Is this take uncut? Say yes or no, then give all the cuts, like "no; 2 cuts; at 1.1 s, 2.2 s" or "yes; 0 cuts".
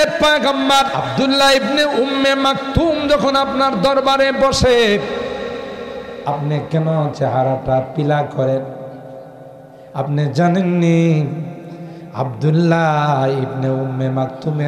no; 1 cut; at 1.0 s